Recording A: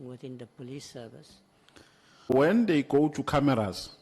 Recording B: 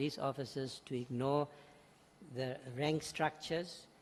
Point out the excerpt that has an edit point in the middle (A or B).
A